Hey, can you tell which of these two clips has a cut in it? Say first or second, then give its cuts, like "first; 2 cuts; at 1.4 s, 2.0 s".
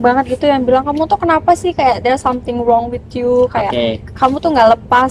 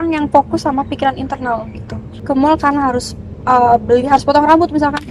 second; 1 cut; at 2.1 s